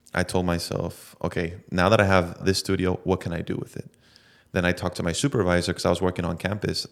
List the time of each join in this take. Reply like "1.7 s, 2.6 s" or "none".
2.4 s